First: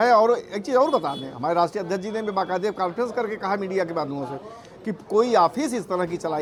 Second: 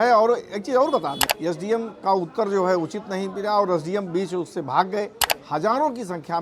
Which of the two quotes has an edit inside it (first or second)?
second